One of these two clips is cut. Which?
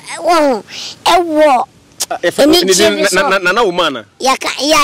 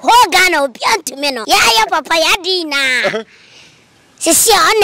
second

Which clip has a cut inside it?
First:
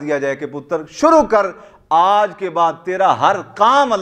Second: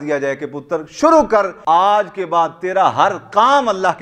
second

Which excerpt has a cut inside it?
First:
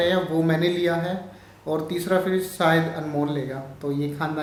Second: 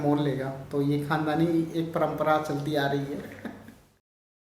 second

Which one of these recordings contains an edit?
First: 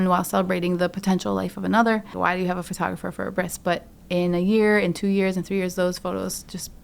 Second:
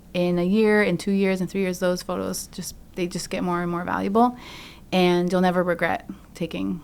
first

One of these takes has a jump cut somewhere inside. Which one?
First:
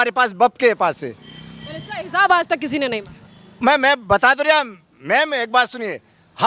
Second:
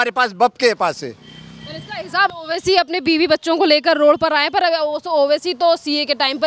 second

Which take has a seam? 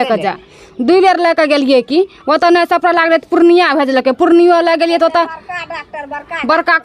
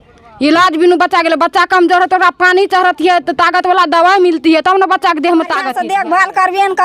second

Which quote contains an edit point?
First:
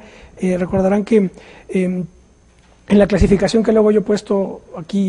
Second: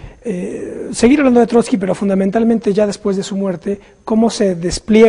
first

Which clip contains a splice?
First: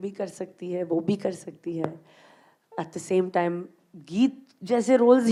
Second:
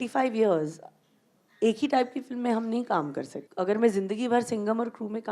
second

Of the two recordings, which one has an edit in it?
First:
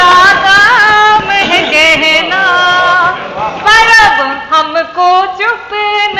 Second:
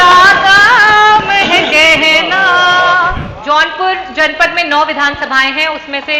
second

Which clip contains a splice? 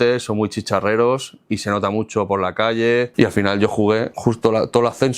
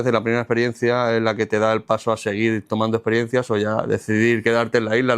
first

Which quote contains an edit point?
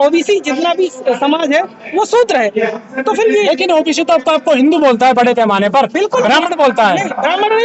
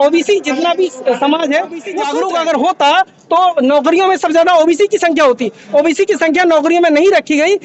second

